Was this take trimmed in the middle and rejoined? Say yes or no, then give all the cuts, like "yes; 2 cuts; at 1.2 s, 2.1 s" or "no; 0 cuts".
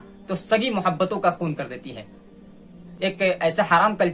no; 0 cuts